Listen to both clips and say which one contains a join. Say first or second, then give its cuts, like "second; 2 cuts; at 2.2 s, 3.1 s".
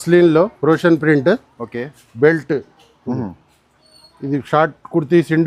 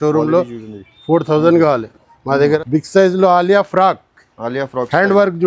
second; 1 cut; at 2.6 s